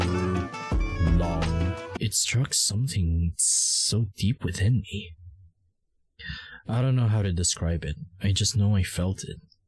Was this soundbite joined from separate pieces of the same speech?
yes; 1 cut; at 1.9 s

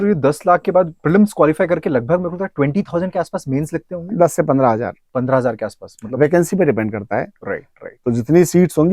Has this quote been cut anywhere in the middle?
no; 0 cuts

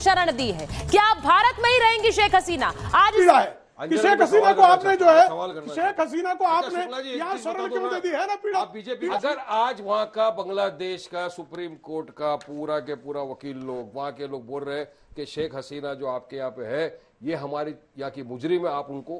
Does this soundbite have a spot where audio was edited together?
yes; 2 cuts; at 3.2 s, 9.1 s

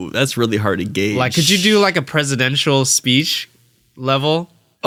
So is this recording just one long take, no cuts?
yes; 0 cuts

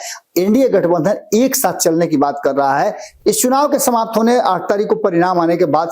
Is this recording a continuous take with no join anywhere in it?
no; 1 cut; at 3.0 s

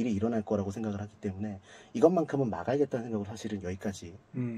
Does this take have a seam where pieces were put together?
no; 0 cuts

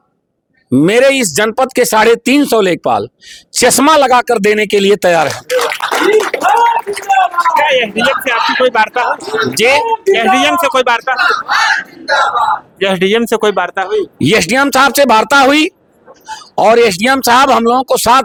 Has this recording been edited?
no; 0 cuts

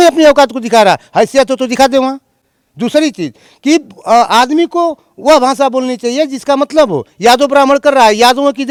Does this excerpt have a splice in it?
no; 0 cuts

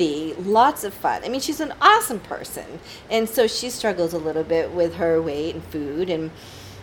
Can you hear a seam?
no; 0 cuts

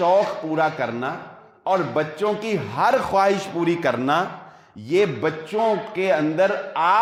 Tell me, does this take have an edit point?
no; 0 cuts

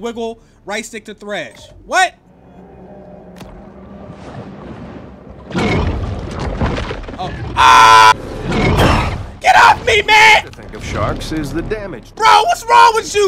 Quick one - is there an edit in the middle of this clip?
no; 0 cuts

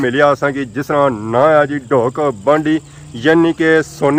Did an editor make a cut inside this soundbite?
no; 0 cuts

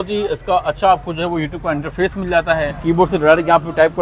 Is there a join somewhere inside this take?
yes; 1 cut; at 2.7 s

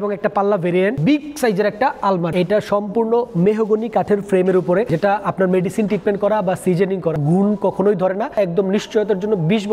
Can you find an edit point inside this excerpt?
yes; 5 cuts; at 1.0 s, 2.3 s, 4.9 s, 7.2 s, 8.4 s

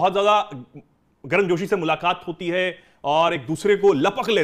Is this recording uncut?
yes; 0 cuts

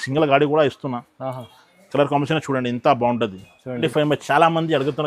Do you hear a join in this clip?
yes; 1 cut; at 3.7 s

